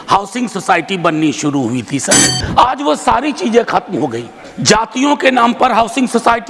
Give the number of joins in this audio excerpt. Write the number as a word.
one